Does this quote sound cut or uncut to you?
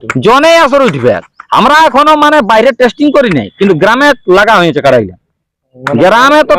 uncut